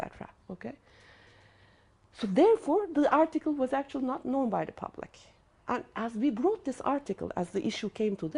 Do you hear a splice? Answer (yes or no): yes